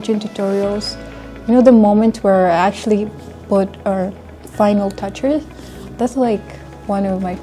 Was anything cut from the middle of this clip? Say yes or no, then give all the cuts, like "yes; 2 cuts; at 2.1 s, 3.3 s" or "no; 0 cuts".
no; 0 cuts